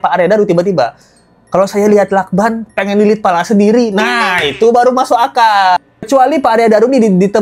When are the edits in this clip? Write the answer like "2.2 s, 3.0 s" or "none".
5.8 s